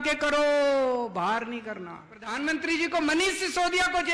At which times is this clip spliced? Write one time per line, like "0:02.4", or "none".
0:02.3